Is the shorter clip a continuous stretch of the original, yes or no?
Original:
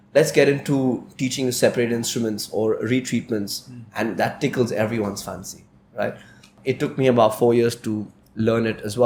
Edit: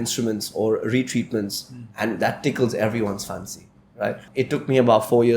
no